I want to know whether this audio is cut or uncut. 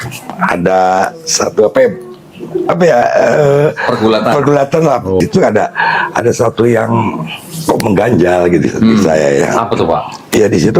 cut